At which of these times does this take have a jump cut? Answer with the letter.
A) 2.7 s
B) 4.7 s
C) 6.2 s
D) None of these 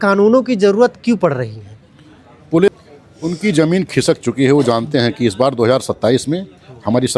A